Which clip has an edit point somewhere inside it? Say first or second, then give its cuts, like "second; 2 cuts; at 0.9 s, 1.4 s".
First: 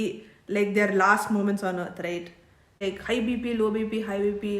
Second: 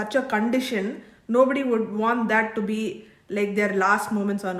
first; 1 cut; at 2.8 s